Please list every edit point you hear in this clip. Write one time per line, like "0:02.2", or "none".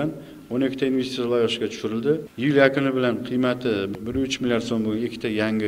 0:02.3
0:03.9

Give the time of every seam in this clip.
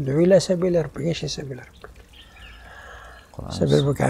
none

